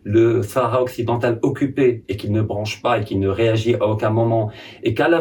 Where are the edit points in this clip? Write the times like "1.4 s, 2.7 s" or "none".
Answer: none